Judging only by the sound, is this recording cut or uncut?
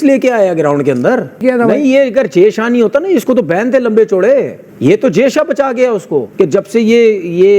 cut